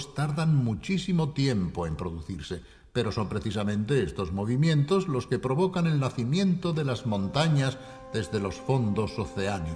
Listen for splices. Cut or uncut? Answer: cut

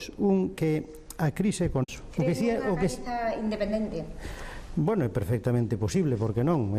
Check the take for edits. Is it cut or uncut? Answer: uncut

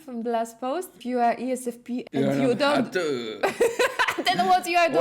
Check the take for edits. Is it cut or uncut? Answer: cut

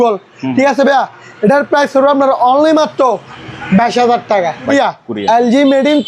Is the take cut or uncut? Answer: cut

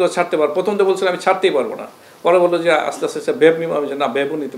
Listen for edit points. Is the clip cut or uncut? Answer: uncut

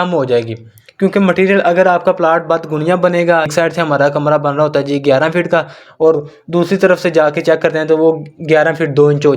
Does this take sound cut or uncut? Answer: cut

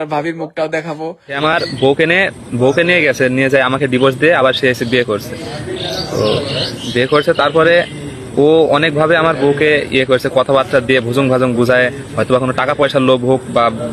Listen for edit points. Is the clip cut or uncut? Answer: cut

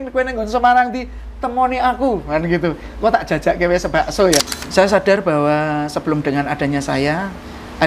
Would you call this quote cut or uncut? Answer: cut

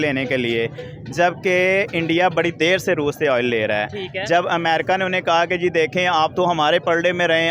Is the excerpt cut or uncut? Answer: uncut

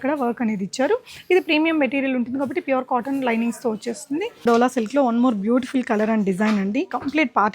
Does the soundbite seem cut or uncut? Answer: cut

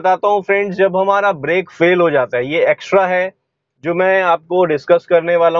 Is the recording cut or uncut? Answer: uncut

